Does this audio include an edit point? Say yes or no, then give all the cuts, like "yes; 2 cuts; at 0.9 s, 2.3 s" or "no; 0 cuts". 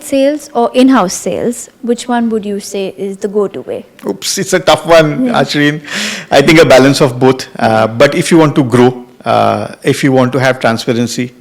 no; 0 cuts